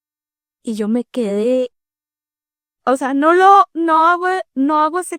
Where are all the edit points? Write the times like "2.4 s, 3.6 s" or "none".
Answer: none